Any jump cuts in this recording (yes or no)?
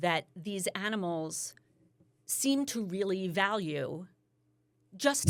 no